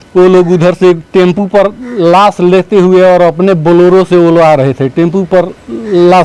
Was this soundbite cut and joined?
no; 0 cuts

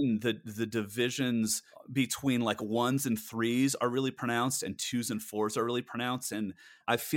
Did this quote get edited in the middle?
no; 0 cuts

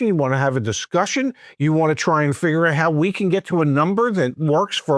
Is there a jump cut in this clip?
no; 0 cuts

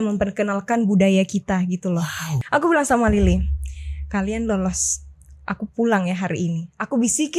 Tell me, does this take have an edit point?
yes; 1 cut; at 2.3 s

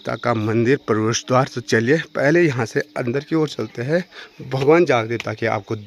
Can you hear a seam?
no; 0 cuts

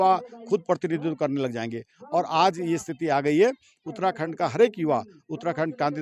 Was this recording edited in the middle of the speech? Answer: no; 0 cuts

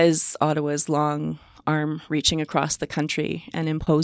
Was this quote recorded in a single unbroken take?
yes; 0 cuts

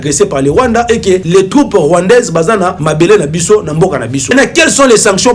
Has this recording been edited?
yes; 3 cuts; at 1.2 s, 2.8 s, 4.3 s

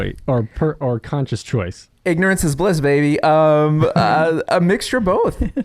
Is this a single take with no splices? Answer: yes; 0 cuts

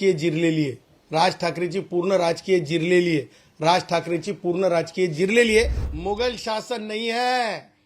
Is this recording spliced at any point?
yes; 1 cut; at 5.9 s

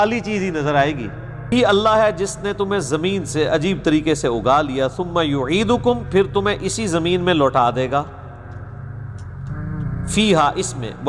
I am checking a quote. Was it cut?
yes; 1 cut; at 1.5 s

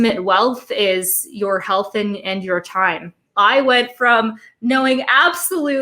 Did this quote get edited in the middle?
yes; 1 cut; at 3.2 s

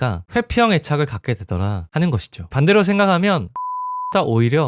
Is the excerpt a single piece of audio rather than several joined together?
no; 1 cut; at 2.3 s

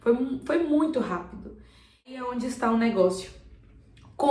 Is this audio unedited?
no; 1 cut; at 2.2 s

